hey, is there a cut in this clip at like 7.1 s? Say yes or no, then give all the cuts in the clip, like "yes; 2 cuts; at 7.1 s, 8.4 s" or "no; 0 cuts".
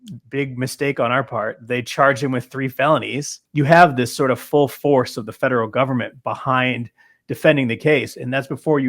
no; 1 cut; at 3.5 s